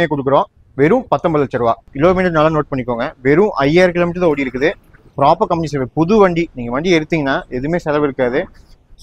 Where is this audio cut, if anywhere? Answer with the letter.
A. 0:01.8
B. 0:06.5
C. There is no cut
A